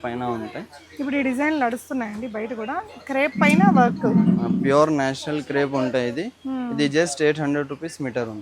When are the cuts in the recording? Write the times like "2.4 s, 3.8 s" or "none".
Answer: none